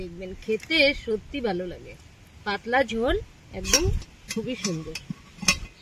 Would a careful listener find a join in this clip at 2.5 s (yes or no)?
no